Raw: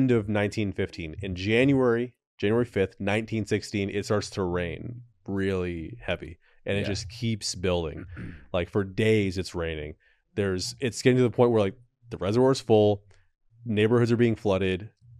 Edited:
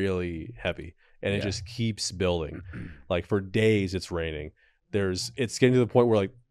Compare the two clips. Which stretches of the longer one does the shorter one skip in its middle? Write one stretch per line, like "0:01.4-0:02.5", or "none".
none